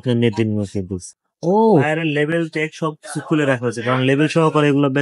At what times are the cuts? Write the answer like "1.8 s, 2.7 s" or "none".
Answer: 1.1 s